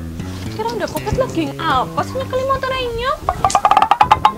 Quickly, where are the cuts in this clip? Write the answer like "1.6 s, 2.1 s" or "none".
3.2 s